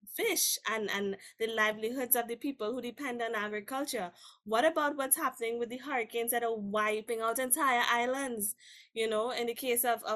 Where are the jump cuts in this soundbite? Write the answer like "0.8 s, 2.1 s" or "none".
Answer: 7.0 s